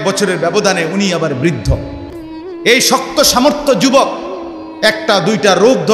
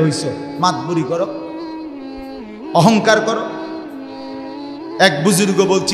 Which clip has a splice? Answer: second; 4 cuts; at 1.3 s, 2.8 s, 3.4 s, 5.0 s

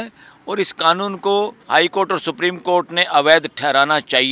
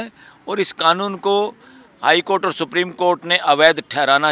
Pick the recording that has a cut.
first; 1 cut; at 1.6 s

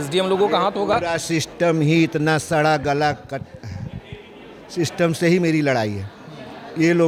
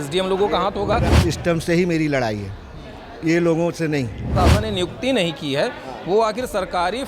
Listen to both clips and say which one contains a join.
second; 2 cuts; at 1.1 s, 4.3 s

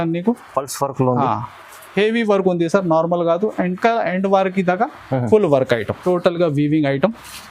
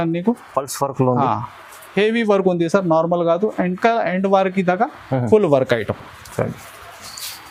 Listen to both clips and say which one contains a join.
first; 1 cut; at 5.9 s

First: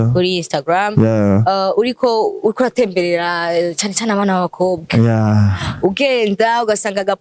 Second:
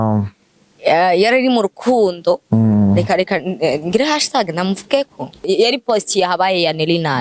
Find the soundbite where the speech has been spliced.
second; 1 cut; at 5.4 s

